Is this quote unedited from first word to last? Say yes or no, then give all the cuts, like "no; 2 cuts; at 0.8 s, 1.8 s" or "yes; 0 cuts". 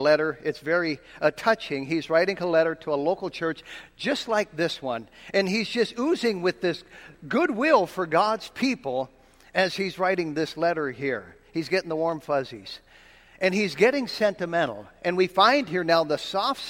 yes; 0 cuts